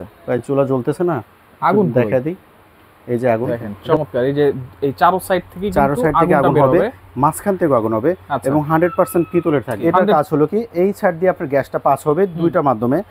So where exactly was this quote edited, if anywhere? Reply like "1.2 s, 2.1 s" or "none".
3.7 s, 9.9 s